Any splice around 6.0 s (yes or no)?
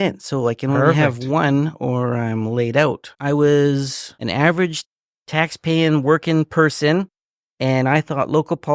no